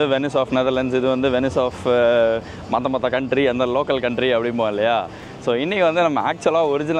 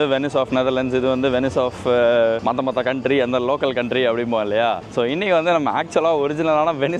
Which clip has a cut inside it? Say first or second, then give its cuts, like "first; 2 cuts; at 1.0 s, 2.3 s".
second; 2 cuts; at 2.4 s, 4.8 s